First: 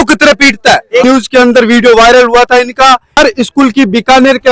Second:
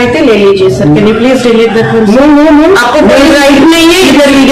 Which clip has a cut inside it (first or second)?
first